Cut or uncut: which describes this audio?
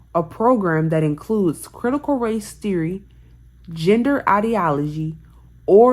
uncut